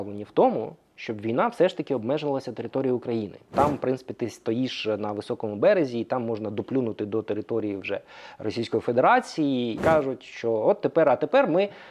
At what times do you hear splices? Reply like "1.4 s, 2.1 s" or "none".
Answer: 3.5 s, 9.8 s